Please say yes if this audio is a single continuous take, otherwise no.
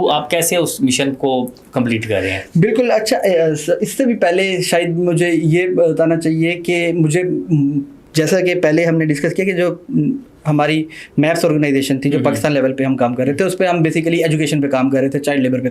yes